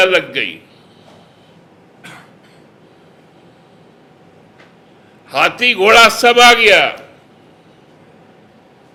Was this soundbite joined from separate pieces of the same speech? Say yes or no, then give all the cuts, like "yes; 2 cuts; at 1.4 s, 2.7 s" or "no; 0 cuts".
no; 0 cuts